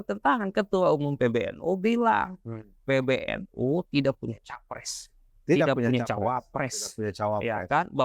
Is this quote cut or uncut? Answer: uncut